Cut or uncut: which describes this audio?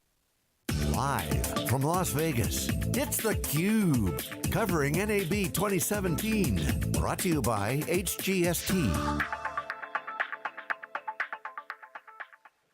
cut